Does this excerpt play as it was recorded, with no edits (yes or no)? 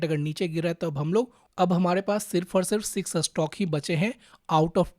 no